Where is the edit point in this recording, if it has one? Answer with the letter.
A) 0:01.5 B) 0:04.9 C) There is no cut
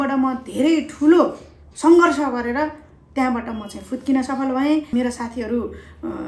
B